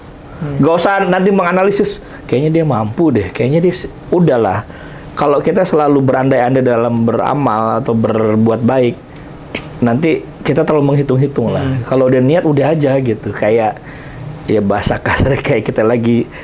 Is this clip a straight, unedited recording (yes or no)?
yes